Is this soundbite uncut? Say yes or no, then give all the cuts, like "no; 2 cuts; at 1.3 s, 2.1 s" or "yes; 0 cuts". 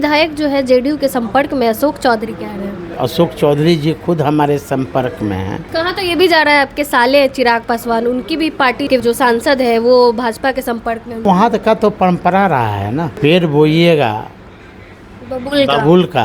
no; 5 cuts; at 2.9 s, 5.6 s, 9.0 s, 11.2 s, 13.1 s